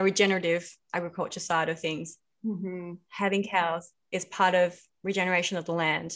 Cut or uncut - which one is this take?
uncut